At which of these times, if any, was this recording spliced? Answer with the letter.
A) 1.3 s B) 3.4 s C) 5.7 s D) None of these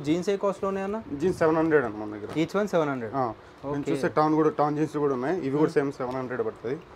D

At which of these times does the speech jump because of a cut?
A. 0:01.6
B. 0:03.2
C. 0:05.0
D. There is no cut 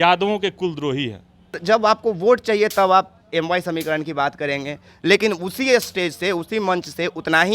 A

